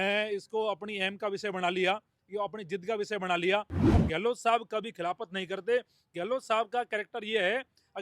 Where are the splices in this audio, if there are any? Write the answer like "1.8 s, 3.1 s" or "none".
3.8 s